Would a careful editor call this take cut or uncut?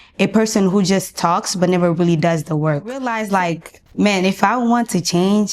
cut